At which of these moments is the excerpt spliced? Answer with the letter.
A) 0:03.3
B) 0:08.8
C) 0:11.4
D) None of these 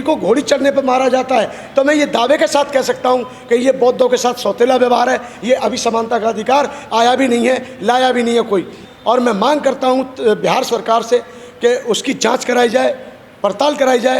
B